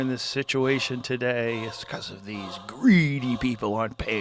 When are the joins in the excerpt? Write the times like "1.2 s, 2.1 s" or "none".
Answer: none